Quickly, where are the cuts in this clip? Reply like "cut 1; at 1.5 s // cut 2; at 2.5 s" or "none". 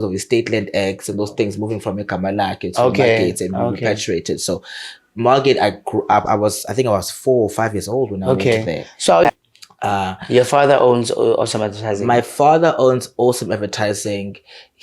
cut 1; at 9.2 s